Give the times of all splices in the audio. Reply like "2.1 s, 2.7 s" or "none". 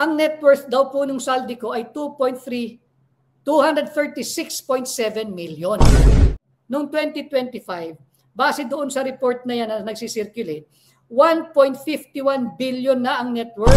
6.3 s